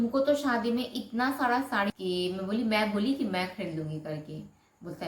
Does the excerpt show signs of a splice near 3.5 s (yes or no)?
no